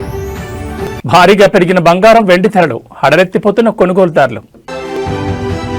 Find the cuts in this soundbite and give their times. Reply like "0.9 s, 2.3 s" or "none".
0.9 s, 4.8 s